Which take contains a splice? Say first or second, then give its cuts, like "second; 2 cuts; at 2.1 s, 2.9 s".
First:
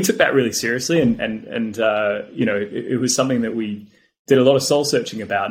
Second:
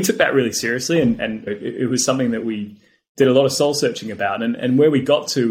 second; 1 cut; at 1.5 s